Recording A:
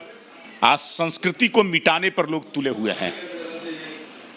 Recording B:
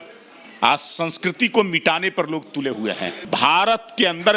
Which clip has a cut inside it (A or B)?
B